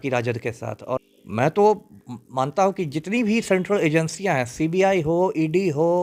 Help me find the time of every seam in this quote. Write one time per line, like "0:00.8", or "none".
0:01.0